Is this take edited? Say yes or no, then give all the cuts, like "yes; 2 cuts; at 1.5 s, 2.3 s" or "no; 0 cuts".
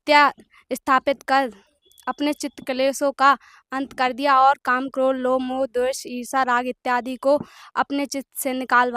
no; 0 cuts